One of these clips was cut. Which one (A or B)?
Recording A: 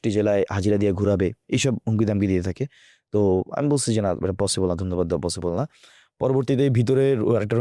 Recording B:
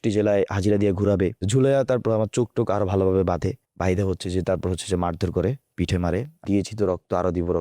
B